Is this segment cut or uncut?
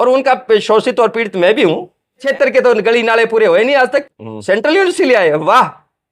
cut